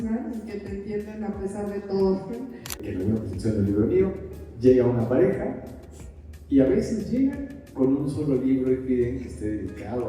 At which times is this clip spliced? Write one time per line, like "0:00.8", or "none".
0:02.8